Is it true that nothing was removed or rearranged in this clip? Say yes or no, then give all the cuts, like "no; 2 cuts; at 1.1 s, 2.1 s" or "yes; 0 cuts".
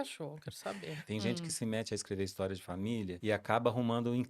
no; 2 cuts; at 1.0 s, 3.2 s